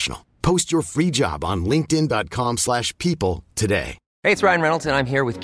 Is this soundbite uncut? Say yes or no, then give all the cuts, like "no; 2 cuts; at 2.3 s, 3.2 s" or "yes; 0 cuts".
no; 1 cut; at 4.0 s